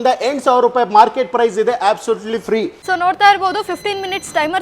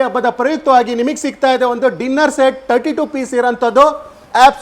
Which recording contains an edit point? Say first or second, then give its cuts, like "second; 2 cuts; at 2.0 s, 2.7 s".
first; 1 cut; at 2.8 s